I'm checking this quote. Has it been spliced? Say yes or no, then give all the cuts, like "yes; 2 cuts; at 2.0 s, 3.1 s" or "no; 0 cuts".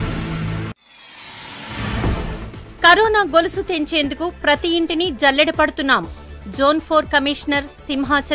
yes; 1 cut; at 2.1 s